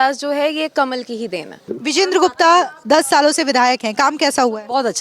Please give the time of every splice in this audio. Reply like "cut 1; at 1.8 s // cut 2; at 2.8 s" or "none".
cut 1; at 1.7 s